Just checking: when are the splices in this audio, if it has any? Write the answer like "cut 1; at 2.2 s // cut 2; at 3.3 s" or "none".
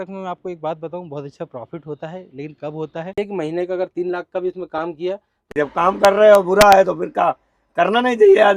cut 1; at 3.2 s // cut 2; at 5.3 s

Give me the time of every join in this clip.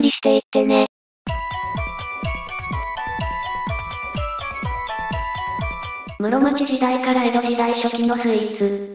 none

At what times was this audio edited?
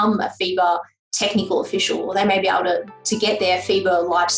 none

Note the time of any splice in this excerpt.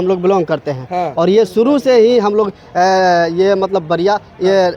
none

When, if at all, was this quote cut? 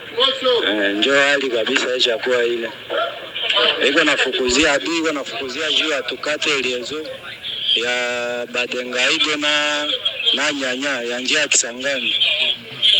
none

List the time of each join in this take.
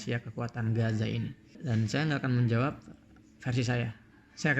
cut 1; at 1.5 s

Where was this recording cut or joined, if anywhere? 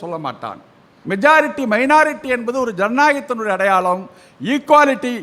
cut 1; at 1.1 s

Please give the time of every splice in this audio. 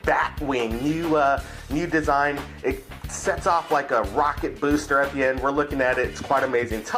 none

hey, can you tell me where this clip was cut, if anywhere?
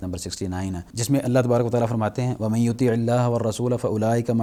none

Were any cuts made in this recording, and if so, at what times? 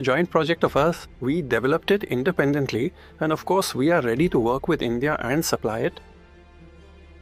cut 1; at 1.1 s

